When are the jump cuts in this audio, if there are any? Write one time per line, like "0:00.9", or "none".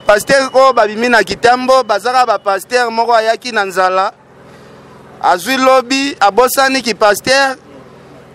none